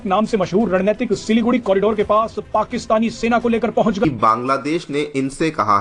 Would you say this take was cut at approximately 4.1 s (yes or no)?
yes